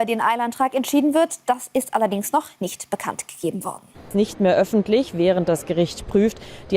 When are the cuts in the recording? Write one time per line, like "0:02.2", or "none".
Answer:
0:04.1